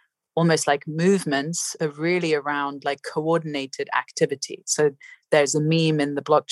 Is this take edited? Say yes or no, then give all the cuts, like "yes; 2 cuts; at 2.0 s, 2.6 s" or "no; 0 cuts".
no; 0 cuts